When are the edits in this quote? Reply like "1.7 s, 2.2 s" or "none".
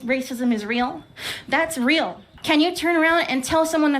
2.3 s